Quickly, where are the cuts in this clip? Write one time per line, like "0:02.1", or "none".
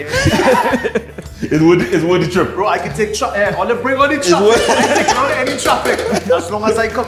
none

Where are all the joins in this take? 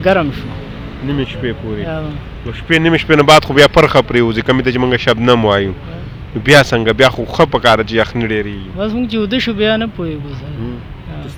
none

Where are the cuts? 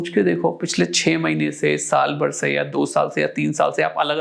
none

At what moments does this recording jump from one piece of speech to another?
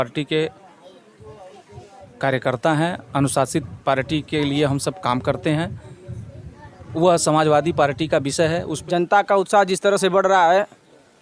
0:08.7

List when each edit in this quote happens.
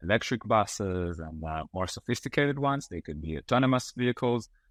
none

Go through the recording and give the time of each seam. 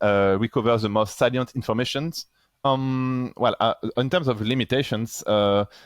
0:02.6

